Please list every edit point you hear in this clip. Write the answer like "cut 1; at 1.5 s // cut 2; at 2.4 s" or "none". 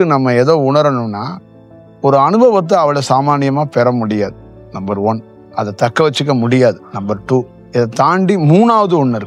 cut 1; at 5.4 s // cut 2; at 7.6 s